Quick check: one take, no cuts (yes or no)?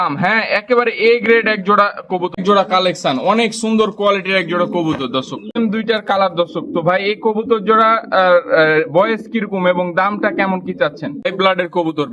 no